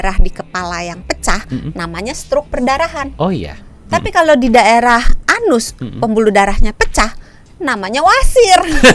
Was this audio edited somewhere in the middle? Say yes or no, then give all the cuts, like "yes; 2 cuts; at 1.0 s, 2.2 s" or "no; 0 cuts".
no; 0 cuts